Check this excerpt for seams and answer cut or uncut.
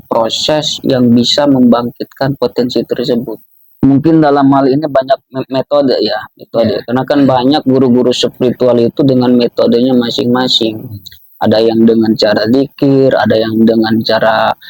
cut